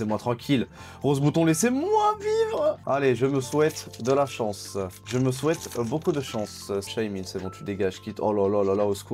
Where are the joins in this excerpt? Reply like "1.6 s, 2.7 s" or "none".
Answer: 2.8 s, 5.0 s, 6.9 s

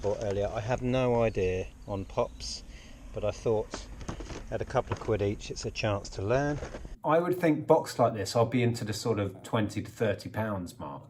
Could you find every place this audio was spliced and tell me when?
6.9 s

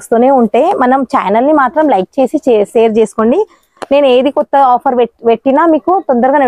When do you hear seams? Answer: none

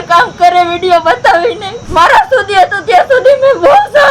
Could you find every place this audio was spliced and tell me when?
1.7 s

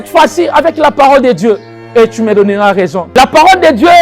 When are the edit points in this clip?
3.1 s

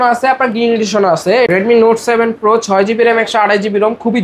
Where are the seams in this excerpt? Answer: 1.5 s

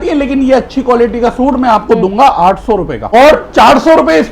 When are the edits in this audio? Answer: 3.0 s

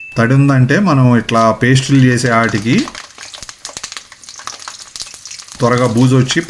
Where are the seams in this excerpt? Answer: none

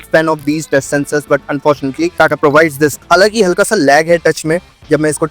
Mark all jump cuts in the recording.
3.0 s

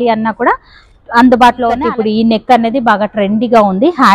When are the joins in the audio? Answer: 1.9 s

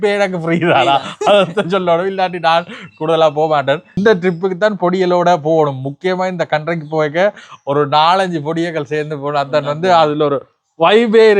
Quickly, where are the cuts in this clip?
3.9 s

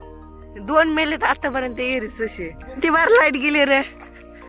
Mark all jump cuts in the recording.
2.6 s

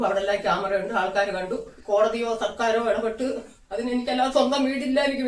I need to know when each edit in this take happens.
1.7 s

